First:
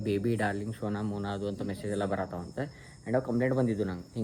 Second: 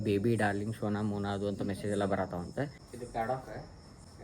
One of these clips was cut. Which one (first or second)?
second